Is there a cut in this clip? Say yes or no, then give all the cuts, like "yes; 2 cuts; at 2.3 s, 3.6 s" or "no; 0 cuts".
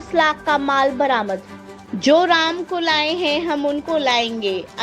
yes; 1 cut; at 2.0 s